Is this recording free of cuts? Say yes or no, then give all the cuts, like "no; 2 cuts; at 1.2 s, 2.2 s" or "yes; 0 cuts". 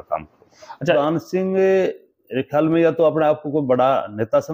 no; 1 cut; at 0.9 s